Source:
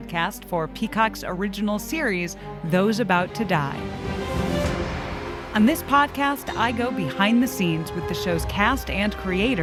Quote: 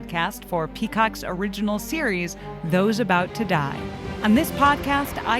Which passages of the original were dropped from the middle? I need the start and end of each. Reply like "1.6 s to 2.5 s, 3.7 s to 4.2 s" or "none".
4.1 s to 5.4 s